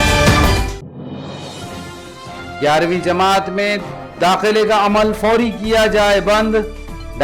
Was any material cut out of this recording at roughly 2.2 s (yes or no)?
yes